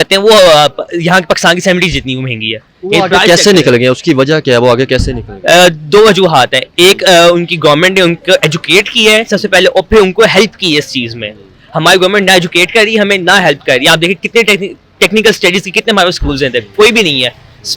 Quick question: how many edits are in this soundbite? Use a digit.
0